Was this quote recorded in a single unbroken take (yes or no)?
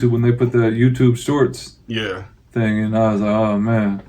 yes